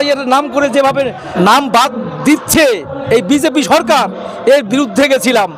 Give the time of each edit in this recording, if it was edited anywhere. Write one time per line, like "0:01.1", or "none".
0:01.3